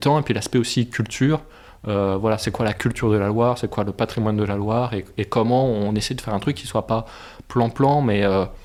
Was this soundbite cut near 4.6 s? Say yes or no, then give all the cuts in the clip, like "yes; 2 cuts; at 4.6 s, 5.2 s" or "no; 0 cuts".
no; 0 cuts